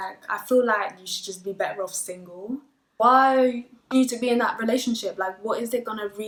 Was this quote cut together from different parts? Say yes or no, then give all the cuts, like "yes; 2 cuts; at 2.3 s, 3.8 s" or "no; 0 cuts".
no; 0 cuts